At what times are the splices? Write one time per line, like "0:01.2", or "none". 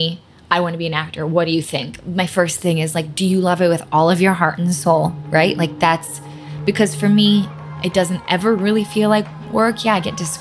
none